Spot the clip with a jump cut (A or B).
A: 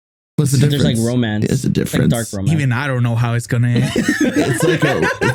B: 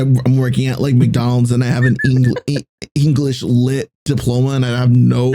B